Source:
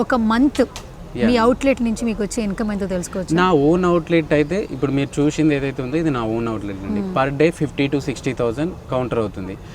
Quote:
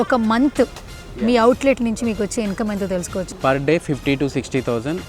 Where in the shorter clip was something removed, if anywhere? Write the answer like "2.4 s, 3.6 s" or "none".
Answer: 3.3 s